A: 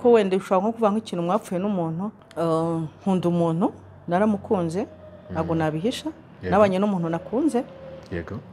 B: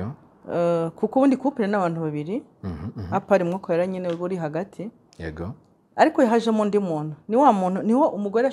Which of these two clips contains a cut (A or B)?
A